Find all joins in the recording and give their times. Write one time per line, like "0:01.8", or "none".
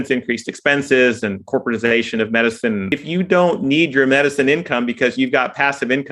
0:02.9